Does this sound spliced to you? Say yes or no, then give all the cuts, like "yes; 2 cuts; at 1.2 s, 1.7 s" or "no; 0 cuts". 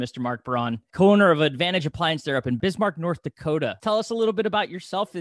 yes; 3 cuts; at 0.9 s, 2.6 s, 3.8 s